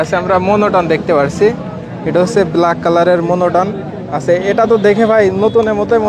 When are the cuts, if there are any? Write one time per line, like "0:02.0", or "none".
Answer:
none